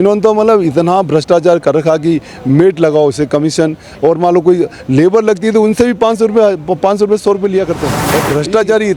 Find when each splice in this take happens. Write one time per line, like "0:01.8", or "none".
0:07.9